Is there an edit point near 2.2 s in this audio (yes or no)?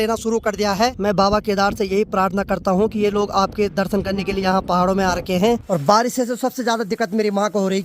no